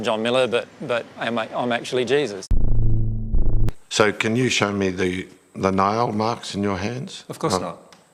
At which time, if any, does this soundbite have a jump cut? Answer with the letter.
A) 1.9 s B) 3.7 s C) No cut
B